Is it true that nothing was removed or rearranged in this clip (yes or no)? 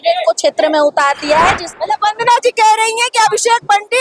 no